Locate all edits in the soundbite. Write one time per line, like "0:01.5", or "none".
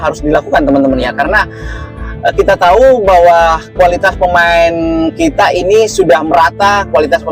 none